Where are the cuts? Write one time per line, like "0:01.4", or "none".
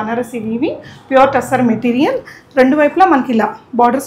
none

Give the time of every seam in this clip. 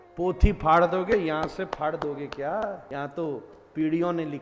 0:02.8

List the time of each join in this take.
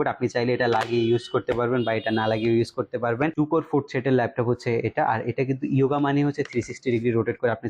0:03.3

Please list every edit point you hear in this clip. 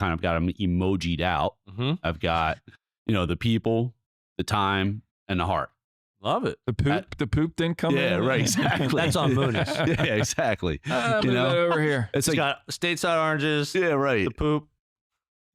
none

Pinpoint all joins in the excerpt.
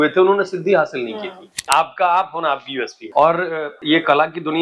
0:01.6
0:03.0
0:03.7

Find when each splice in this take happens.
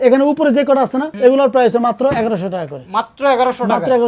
0:01.1

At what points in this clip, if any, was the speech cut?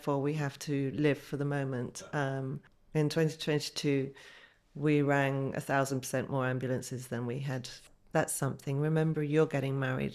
0:02.7
0:07.7

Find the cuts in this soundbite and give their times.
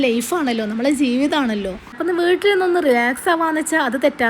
0:02.0

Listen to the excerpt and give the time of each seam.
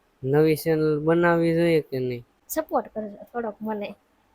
0:02.3

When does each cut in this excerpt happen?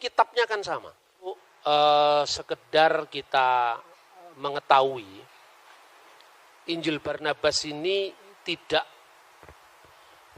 0:01.4

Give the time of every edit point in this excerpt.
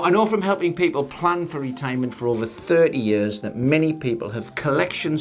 none

